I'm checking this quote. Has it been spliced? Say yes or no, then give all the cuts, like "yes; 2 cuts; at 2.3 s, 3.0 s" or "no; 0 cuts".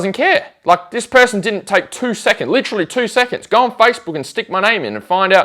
no; 0 cuts